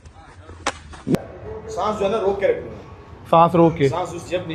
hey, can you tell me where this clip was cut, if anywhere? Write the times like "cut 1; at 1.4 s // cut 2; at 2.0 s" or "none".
cut 1; at 1.1 s